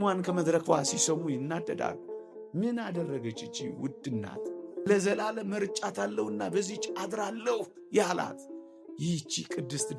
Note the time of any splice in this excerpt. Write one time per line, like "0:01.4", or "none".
0:04.9